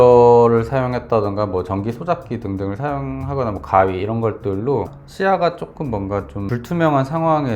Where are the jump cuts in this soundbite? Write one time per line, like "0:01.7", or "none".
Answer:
0:04.9
0:06.5

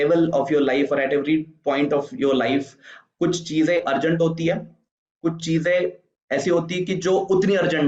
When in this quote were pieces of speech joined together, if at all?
none

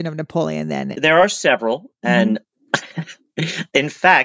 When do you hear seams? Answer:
0:00.9

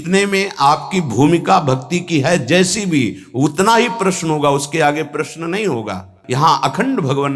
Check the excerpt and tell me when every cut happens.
0:06.2

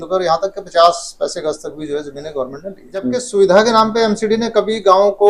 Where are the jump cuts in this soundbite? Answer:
0:03.1

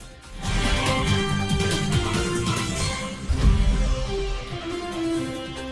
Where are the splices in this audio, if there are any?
0:01.0
0:03.3

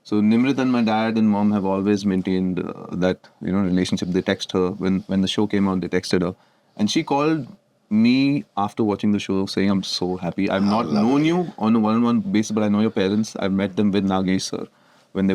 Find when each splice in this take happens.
none

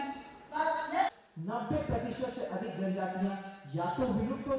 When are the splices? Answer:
0:01.1

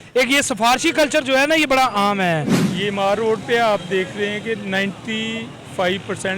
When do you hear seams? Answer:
0:02.6

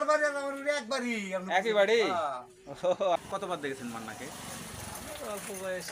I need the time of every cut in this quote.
0:03.2

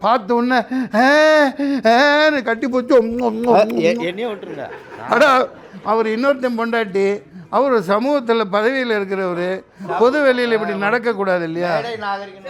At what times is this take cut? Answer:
none

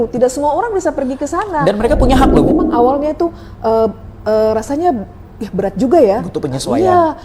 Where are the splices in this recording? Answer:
0:02.5

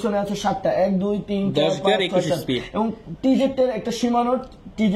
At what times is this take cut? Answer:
none

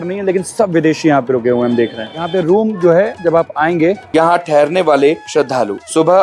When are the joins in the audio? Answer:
0:02.3
0:04.0

